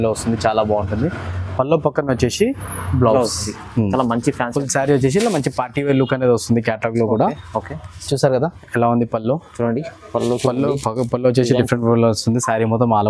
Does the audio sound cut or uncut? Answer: cut